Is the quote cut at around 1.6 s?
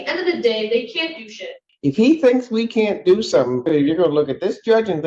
yes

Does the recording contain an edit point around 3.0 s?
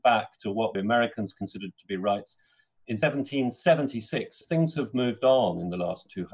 yes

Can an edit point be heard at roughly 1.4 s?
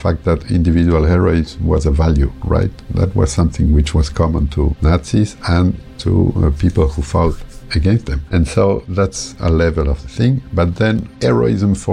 no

